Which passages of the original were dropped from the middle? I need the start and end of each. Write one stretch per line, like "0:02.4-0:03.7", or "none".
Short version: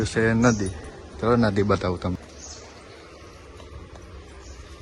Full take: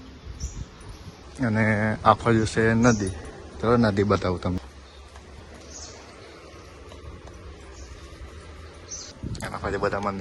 0:04.6-0:05.5